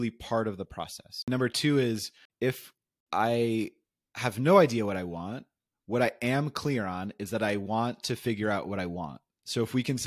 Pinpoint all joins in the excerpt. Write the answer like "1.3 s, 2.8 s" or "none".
1.2 s, 2.6 s